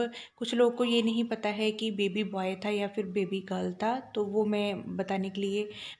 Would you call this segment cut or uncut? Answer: uncut